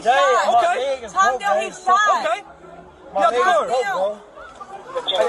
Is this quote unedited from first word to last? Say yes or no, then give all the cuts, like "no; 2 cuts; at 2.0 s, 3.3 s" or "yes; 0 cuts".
yes; 0 cuts